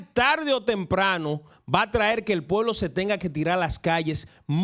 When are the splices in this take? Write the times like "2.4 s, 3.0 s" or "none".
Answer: none